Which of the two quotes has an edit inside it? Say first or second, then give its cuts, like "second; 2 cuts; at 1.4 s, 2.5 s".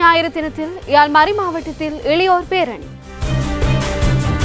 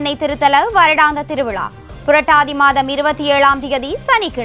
first; 1 cut; at 3.1 s